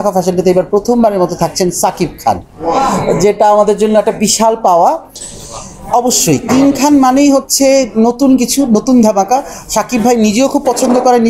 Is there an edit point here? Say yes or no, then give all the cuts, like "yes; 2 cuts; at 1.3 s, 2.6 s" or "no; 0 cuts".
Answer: yes; 1 cut; at 5.2 s